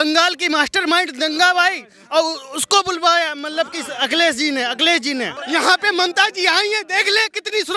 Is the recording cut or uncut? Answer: cut